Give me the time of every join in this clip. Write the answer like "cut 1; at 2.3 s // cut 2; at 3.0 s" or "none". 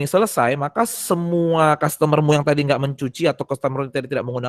none